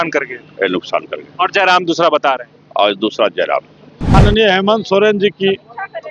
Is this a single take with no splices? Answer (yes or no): no